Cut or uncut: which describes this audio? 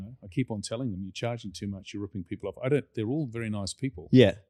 uncut